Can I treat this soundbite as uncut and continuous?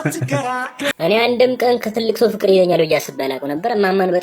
no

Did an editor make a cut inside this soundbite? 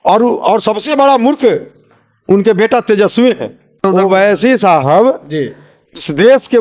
yes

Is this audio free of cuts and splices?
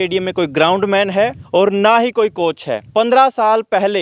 no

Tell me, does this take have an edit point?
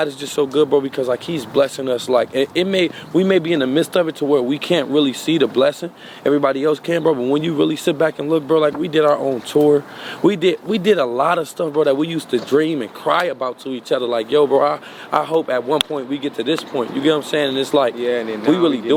no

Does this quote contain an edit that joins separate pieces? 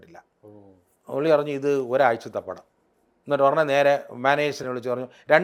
no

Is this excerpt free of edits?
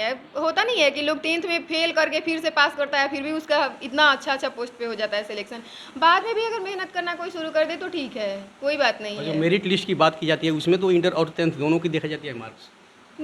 yes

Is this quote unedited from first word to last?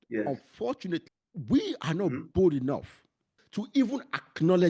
no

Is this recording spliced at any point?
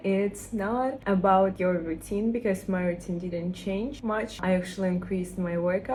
no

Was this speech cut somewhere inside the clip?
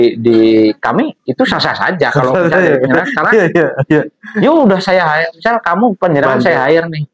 no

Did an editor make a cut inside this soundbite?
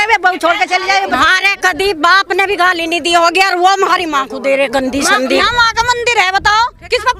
yes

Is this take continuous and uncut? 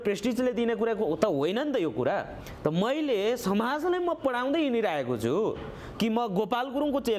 yes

